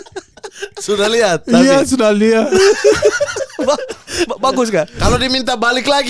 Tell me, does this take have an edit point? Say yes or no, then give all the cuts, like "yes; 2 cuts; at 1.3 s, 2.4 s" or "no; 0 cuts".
yes; 1 cut; at 5.0 s